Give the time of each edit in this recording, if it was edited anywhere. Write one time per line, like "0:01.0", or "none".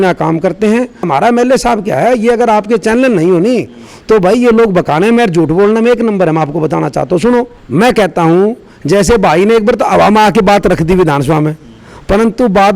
0:01.1
0:07.6